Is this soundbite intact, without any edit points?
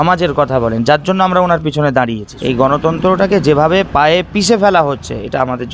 no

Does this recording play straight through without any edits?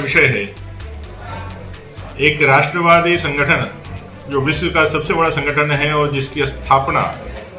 yes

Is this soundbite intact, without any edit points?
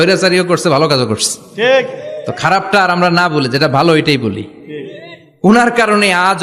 yes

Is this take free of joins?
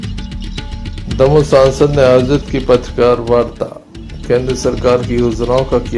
no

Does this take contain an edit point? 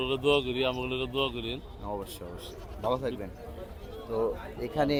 no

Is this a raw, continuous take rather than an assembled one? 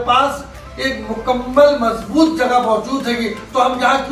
yes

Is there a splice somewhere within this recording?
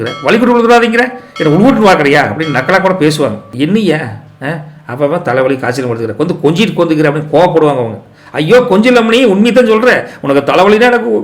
yes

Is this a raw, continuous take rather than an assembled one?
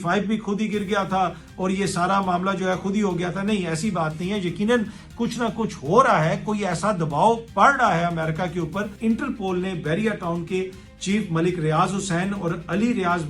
no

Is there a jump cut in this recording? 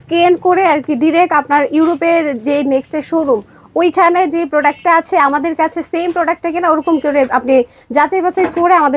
no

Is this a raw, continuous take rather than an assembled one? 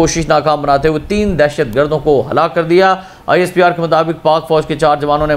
yes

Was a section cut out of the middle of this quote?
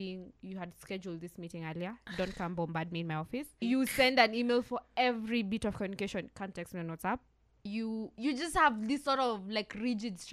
yes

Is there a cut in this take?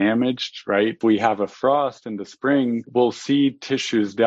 yes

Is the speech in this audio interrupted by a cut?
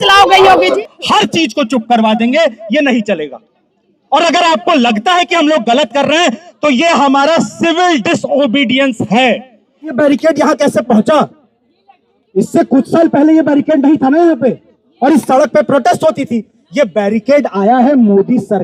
yes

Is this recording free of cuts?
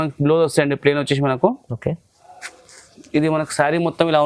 yes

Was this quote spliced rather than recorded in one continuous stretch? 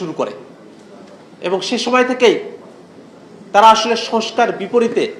no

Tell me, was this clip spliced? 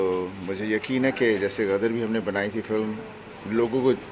no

